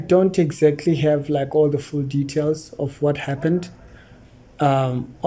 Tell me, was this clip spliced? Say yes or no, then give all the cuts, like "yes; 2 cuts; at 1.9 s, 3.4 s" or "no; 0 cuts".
no; 0 cuts